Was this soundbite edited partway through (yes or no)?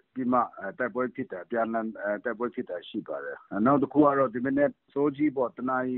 yes